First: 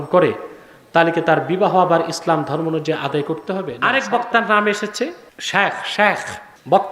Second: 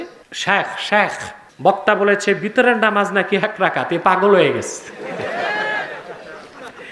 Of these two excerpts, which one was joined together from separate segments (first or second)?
first